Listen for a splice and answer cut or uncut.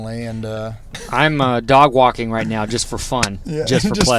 cut